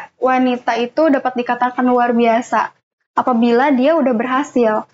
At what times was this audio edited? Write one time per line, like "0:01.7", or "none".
none